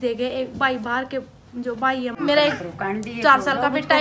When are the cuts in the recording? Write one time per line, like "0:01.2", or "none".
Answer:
0:02.2